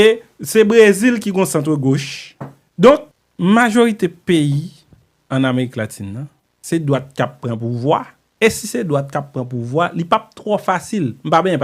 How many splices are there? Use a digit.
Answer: 1